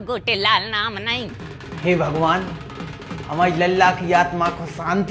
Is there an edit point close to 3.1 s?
no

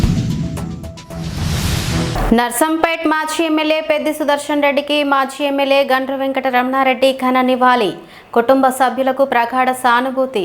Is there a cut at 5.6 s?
no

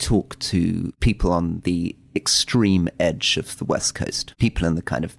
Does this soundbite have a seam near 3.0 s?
no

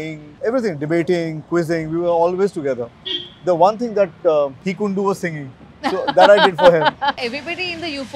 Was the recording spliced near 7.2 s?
yes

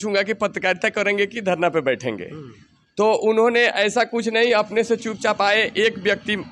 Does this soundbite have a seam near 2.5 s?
no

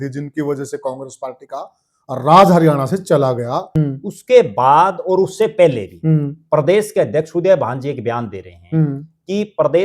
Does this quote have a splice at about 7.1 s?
no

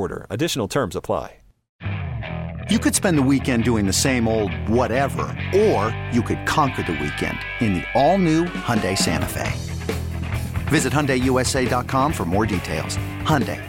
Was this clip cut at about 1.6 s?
yes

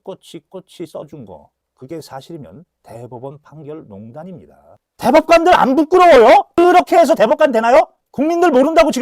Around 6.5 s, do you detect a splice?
no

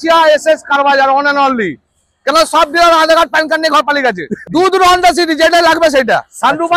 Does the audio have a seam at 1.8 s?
no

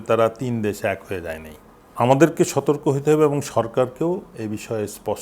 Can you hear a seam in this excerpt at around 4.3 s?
yes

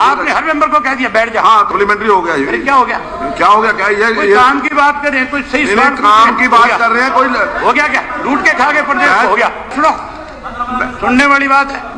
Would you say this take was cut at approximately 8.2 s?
no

